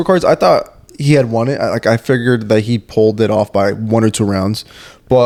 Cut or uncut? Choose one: uncut